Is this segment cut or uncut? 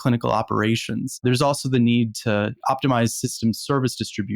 cut